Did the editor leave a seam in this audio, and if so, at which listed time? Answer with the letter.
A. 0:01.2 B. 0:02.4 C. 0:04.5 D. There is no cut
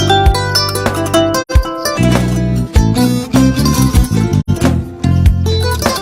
C